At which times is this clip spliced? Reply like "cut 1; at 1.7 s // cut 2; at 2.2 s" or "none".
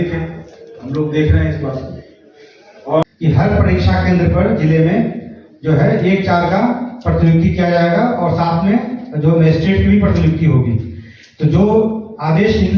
cut 1; at 3.0 s